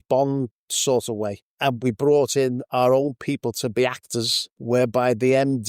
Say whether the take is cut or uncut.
cut